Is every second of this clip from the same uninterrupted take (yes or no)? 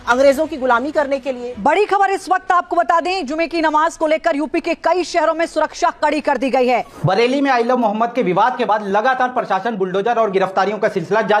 no